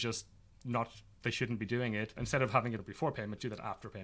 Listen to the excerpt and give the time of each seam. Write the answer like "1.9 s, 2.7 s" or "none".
2.2 s, 2.9 s

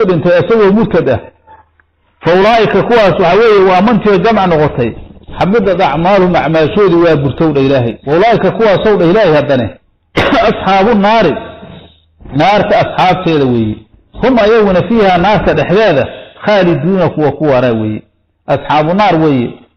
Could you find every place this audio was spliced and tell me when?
8.0 s

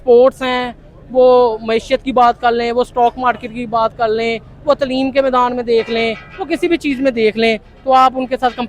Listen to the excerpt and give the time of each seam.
none

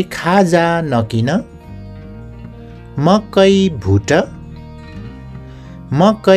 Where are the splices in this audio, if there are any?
none

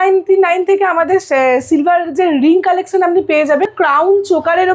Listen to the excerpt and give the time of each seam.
3.7 s

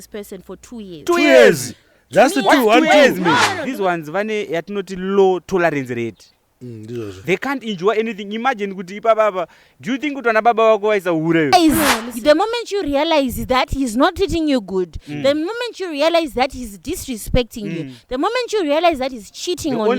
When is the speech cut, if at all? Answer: 3.7 s, 11.5 s

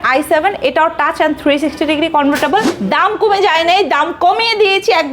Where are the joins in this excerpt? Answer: 2.8 s

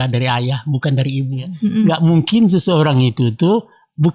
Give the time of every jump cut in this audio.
1.9 s

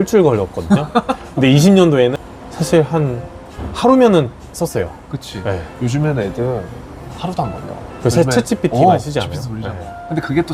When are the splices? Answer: none

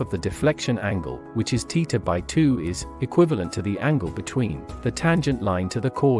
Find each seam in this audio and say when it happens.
none

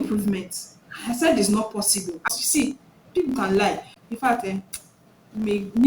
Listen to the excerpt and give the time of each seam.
2.2 s, 3.9 s

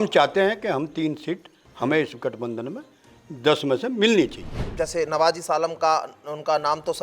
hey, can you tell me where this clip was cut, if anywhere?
4.7 s

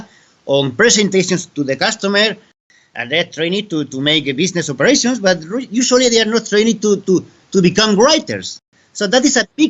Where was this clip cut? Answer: 2.6 s, 8.7 s

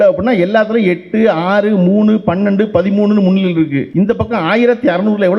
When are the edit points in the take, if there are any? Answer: 3.9 s

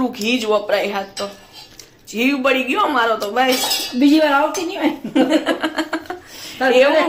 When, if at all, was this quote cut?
none

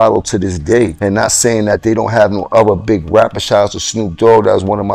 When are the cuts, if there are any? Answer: 1.0 s

